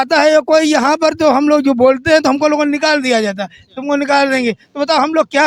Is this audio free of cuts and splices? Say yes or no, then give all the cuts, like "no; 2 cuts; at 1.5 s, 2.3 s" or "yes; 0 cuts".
yes; 0 cuts